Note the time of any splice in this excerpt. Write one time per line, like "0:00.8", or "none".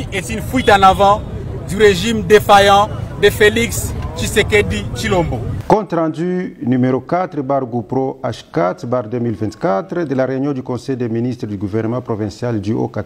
0:05.5